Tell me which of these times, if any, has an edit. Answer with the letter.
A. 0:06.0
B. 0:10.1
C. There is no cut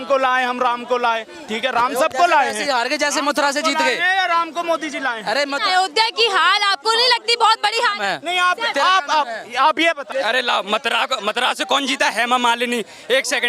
B